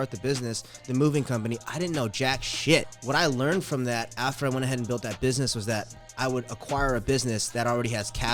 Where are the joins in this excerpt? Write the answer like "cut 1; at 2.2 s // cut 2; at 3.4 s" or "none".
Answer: cut 1; at 3.0 s // cut 2; at 6.0 s